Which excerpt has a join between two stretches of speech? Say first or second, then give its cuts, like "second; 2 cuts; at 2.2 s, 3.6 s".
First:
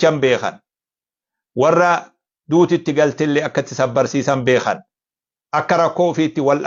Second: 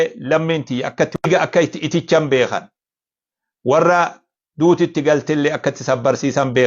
second; 1 cut; at 1.1 s